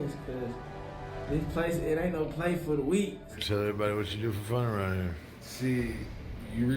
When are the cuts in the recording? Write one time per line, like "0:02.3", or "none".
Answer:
0:03.3